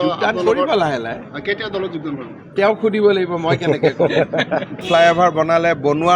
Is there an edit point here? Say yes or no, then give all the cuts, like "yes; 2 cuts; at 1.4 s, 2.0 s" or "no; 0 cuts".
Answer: no; 0 cuts